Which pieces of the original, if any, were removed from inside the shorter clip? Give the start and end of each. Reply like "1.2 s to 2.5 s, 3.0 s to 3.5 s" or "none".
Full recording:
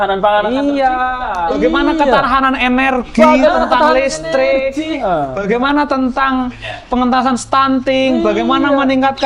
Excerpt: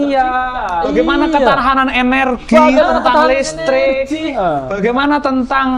none